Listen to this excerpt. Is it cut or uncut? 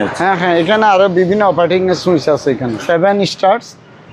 cut